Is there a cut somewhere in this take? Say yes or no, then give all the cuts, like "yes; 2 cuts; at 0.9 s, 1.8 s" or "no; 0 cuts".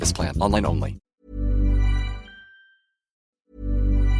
yes; 2 cuts; at 1.0 s, 3.2 s